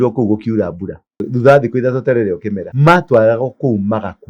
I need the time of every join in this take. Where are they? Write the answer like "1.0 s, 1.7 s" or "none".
1.3 s, 2.6 s